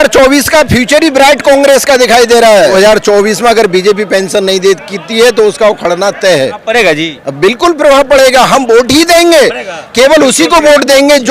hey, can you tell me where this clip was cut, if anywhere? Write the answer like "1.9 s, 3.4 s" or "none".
2.7 s, 6.6 s